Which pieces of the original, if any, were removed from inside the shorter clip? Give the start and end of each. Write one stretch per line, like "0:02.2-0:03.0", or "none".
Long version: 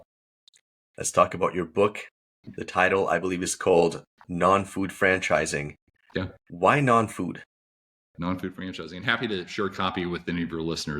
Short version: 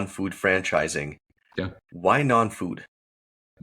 none